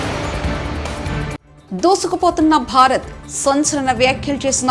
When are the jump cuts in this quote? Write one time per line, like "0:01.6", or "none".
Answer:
0:01.5